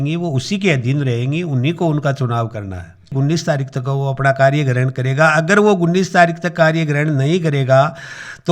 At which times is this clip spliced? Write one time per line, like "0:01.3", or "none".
0:03.1